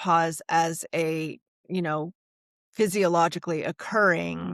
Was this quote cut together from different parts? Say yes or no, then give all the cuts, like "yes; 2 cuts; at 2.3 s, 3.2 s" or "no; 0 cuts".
no; 0 cuts